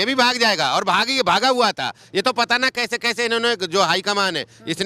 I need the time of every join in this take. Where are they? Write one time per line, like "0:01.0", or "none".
none